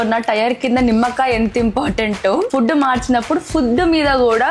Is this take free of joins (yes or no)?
yes